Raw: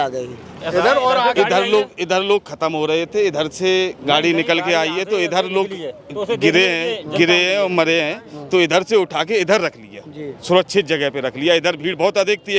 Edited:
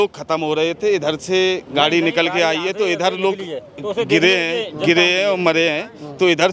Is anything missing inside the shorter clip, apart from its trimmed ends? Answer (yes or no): no